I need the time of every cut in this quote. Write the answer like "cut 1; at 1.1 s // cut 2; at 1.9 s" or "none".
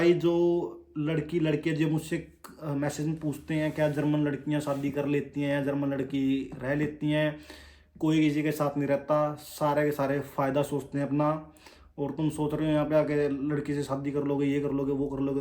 none